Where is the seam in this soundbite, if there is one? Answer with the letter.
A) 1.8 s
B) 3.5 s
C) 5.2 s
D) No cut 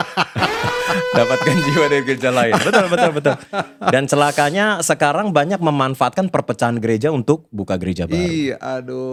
D